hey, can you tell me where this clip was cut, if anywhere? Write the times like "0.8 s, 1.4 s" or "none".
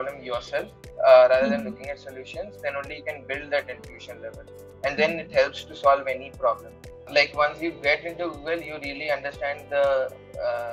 7.1 s

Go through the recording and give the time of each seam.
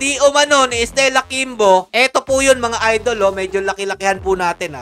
none

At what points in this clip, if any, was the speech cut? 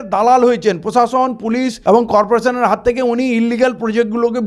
none

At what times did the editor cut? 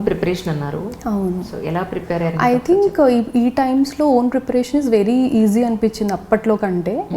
none

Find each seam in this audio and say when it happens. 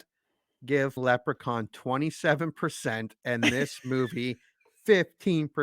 1.0 s

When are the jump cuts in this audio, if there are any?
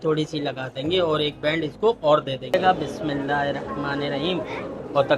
2.5 s

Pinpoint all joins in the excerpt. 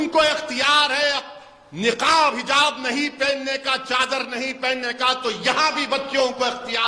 none

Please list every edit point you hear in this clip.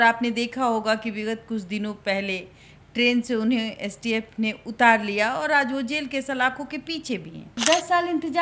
7.5 s

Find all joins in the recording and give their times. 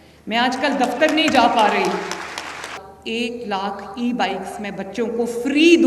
2.9 s

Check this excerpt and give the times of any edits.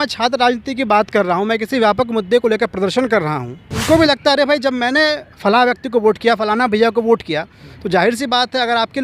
3.8 s

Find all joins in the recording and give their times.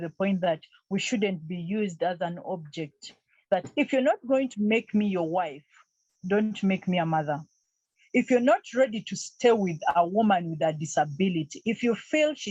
none

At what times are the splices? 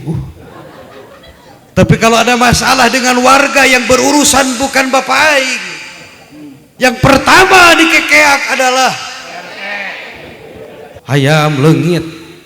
11.0 s

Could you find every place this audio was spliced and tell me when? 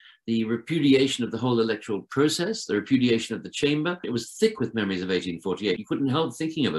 4.1 s, 5.8 s

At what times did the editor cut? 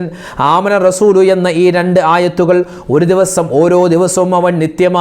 none

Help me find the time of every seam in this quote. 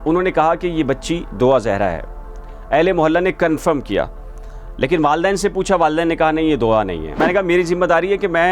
7.2 s

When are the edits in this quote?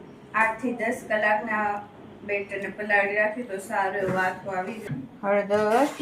4.8 s

